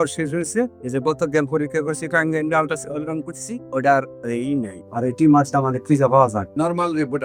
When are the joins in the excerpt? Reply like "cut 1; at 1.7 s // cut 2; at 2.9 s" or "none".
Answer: none